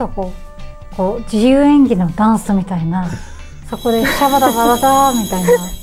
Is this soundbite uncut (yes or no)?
yes